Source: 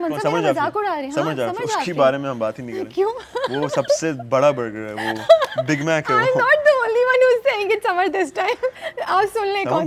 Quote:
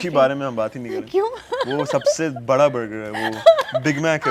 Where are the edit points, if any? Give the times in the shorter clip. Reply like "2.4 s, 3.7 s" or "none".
none